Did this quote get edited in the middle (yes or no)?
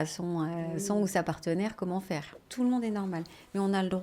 yes